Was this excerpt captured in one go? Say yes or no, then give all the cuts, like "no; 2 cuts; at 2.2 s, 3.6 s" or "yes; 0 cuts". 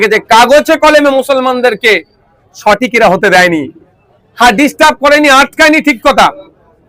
yes; 0 cuts